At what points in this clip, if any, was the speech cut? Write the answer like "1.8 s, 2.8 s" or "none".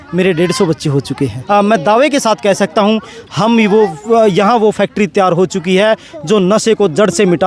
1.4 s